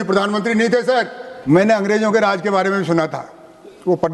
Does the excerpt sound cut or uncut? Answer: cut